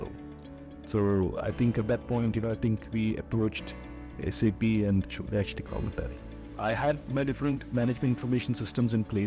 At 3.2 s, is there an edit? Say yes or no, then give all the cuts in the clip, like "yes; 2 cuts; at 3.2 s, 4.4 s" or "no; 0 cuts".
no; 1 cut; at 6.5 s